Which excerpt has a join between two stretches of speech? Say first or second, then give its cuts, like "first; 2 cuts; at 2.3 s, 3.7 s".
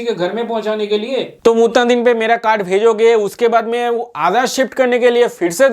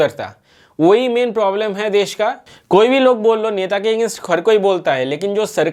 first; 1 cut; at 1.4 s